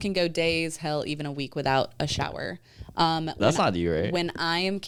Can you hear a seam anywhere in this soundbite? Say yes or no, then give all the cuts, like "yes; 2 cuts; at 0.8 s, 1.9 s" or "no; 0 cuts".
no; 0 cuts